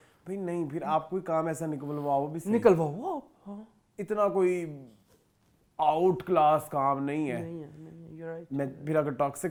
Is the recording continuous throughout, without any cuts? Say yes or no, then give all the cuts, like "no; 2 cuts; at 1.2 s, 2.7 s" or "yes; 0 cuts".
yes; 0 cuts